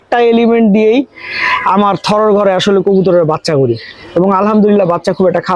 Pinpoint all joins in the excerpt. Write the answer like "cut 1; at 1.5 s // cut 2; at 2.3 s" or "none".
none